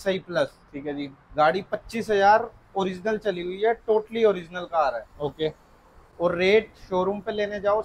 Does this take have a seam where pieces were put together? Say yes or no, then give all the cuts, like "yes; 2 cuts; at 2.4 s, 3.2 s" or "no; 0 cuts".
no; 0 cuts